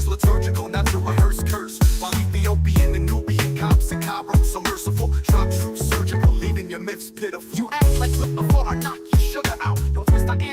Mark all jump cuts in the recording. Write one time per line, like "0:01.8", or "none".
0:08.2